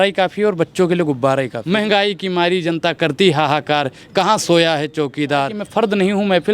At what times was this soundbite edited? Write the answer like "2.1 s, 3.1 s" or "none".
1.6 s, 5.6 s